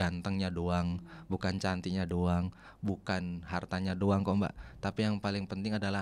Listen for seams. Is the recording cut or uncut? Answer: uncut